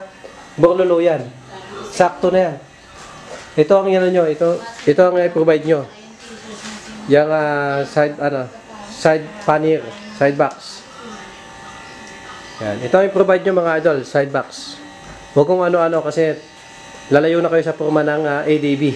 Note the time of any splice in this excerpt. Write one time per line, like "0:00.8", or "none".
none